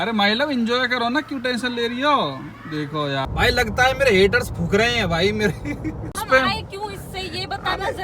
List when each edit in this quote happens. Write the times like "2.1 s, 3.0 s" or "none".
3.2 s, 6.2 s

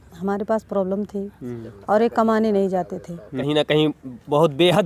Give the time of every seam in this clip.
3.4 s

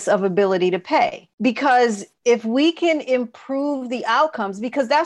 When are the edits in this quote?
1.2 s, 2.1 s

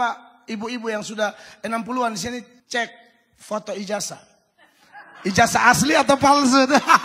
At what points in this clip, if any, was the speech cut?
2.6 s

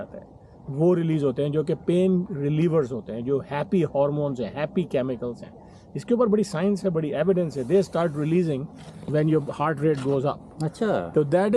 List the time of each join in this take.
none

